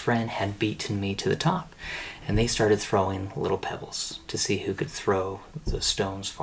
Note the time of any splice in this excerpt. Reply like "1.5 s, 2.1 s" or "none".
none